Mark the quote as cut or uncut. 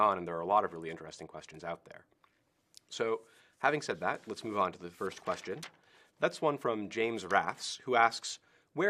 uncut